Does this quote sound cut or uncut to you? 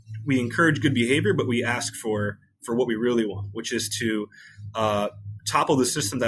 uncut